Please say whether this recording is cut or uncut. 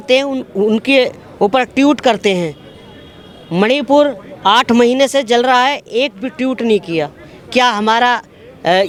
uncut